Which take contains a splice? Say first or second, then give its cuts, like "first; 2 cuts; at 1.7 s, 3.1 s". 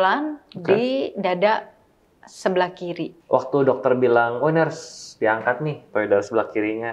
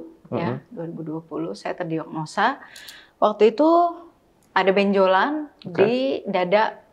first; 1 cut; at 3.1 s